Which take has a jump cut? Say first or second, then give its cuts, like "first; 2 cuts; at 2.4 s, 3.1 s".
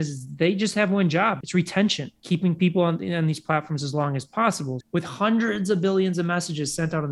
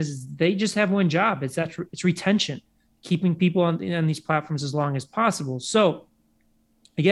first; 3 cuts; at 1.4 s, 2.1 s, 4.7 s